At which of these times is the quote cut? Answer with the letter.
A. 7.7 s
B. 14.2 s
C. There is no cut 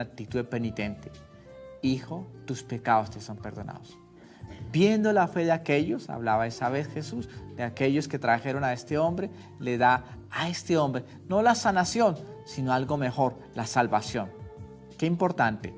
A